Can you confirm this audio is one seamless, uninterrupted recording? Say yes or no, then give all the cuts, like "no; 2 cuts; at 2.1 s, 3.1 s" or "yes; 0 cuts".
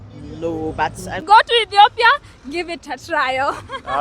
no; 1 cut; at 1.1 s